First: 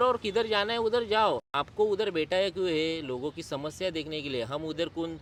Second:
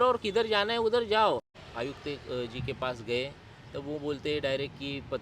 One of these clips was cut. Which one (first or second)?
second